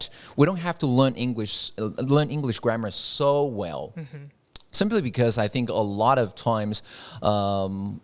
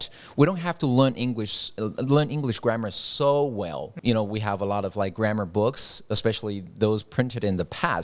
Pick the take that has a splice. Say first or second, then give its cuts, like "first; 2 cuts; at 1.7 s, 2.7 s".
second; 1 cut; at 3.9 s